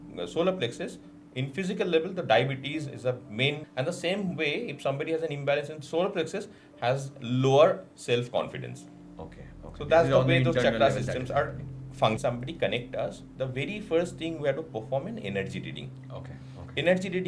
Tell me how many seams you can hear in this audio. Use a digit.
1